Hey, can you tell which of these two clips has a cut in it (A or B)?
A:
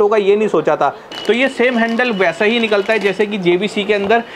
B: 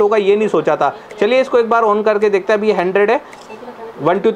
A